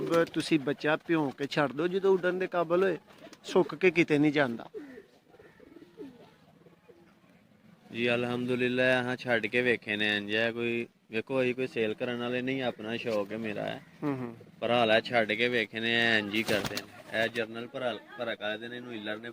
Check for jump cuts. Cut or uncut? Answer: uncut